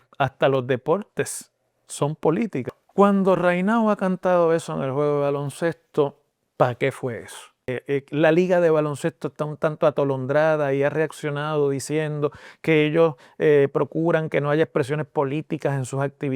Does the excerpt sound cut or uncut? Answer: cut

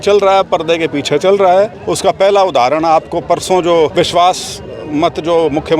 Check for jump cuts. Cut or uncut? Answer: cut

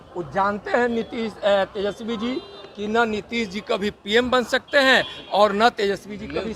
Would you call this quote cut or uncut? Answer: uncut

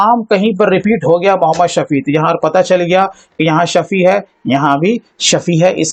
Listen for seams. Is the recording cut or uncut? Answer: uncut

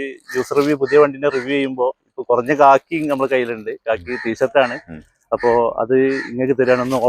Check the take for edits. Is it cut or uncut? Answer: uncut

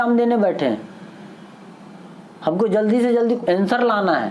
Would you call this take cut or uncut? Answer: cut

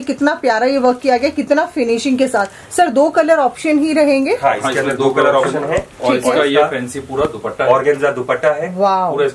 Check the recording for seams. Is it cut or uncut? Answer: uncut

